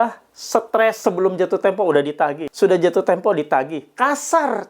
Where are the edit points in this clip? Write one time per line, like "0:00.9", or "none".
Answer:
0:01.0
0:02.4